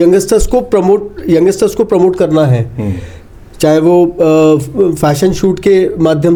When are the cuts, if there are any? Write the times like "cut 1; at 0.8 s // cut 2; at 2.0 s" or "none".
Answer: none